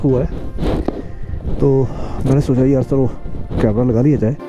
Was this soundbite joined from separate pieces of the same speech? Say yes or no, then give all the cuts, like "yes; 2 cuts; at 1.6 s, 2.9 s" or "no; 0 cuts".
no; 0 cuts